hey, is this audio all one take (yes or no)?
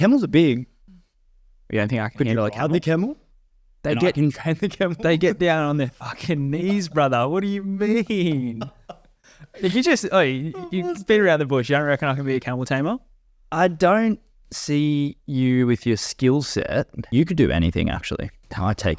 no